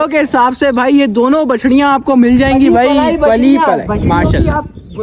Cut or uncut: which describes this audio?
uncut